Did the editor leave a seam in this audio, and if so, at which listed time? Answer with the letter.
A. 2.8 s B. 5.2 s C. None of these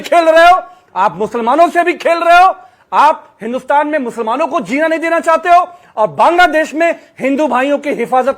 B